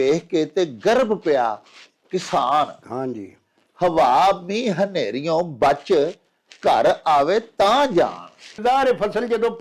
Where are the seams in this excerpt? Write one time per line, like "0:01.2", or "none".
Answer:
0:08.6